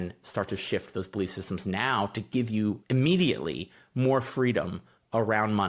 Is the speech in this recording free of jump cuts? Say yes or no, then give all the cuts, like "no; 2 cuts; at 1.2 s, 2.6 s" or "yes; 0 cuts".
no; 1 cut; at 2.8 s